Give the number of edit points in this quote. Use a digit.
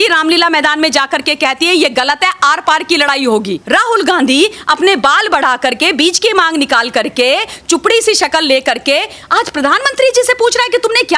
1